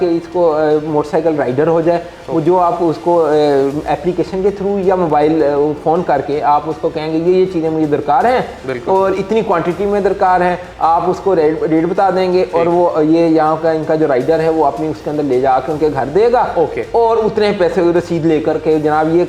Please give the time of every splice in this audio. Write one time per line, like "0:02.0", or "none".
none